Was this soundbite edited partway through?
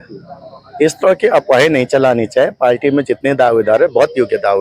no; 0 cuts

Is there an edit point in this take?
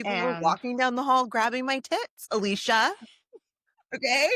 no; 0 cuts

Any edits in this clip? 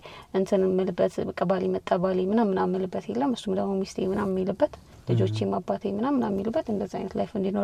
no; 0 cuts

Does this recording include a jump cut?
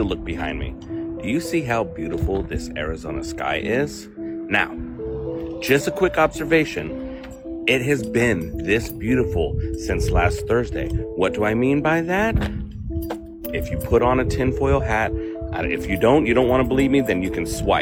no; 0 cuts

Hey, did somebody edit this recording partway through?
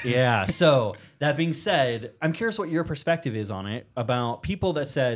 no; 0 cuts

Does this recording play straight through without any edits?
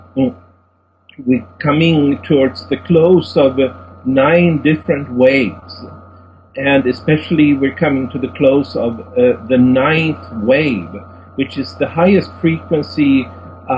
yes; 0 cuts

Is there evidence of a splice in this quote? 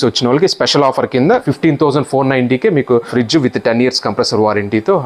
yes; 2 cuts; at 1.5 s, 3.1 s

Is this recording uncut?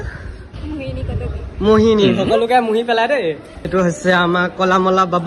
no; 1 cut; at 3.5 s

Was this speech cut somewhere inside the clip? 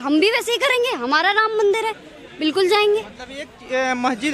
no; 0 cuts

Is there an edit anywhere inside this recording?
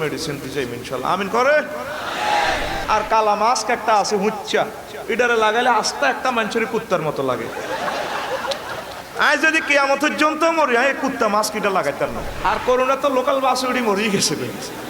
yes; 2 cuts; at 2.8 s, 12.3 s

